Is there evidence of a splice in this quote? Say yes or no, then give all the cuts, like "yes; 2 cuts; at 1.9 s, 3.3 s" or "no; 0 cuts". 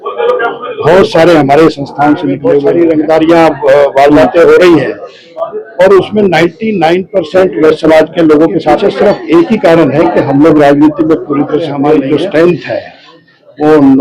yes; 3 cuts; at 2.7 s, 8.9 s, 12.0 s